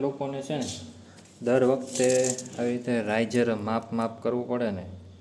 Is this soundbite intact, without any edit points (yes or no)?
yes